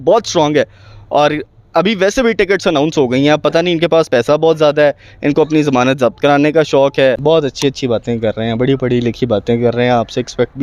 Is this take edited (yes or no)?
yes